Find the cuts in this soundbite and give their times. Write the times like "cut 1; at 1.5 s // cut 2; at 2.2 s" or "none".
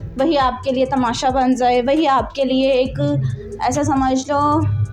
none